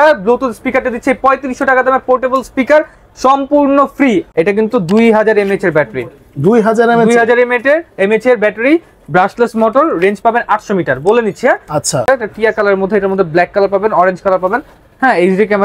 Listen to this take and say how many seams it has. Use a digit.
2